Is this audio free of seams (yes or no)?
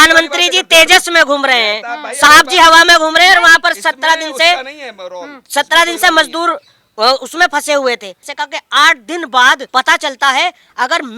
no